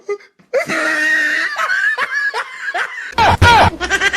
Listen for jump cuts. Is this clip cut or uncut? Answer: cut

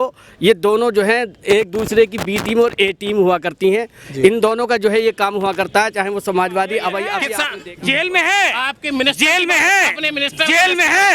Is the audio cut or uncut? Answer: cut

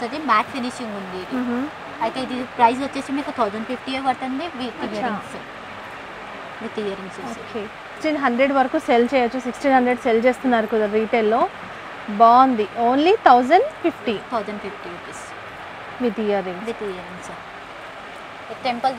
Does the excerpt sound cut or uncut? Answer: uncut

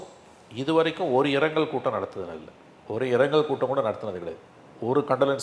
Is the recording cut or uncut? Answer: uncut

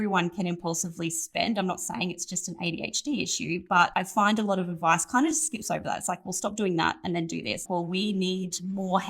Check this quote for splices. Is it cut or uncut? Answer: cut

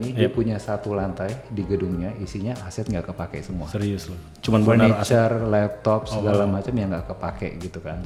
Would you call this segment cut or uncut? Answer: uncut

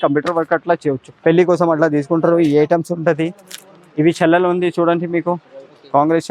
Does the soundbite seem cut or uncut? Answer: cut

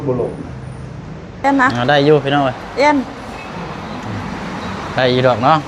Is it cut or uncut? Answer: cut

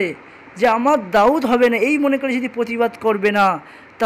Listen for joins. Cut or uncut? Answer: uncut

